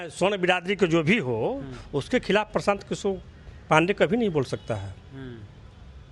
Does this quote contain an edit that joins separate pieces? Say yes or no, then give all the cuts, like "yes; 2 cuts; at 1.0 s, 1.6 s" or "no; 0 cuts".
no; 0 cuts